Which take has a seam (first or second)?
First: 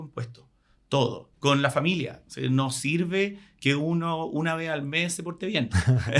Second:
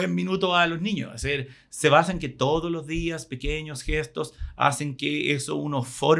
first